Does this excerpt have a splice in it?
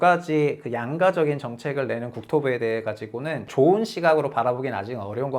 yes; 1 cut; at 3.5 s

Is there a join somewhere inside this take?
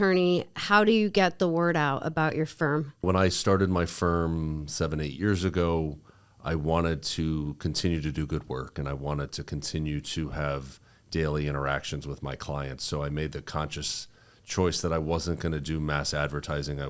yes; 1 cut; at 3.0 s

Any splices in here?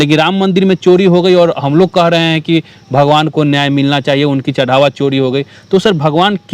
no; 0 cuts

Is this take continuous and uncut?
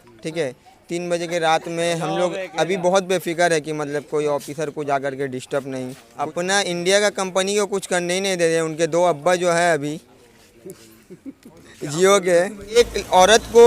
no; 2 cuts; at 6.0 s, 12.8 s

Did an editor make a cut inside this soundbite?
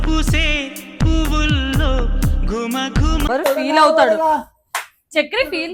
yes; 1 cut; at 3.3 s

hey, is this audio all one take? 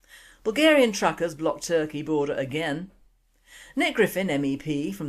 no; 1 cut; at 1.0 s

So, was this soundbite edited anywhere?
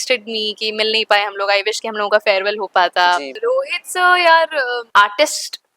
yes; 2 cuts; at 3.3 s, 4.8 s

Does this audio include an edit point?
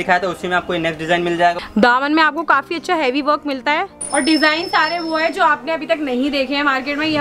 yes; 2 cuts; at 1.6 s, 4.0 s

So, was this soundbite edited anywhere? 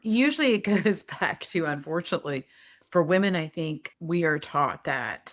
no; 0 cuts

